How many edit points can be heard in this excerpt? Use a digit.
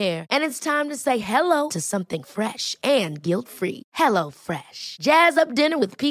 0